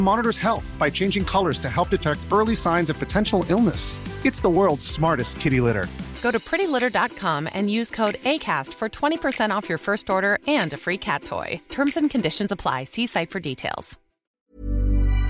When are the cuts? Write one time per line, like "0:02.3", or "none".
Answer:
0:14.4